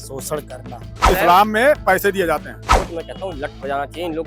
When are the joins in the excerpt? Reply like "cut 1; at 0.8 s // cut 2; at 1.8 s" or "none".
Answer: cut 1; at 1.1 s // cut 2; at 2.8 s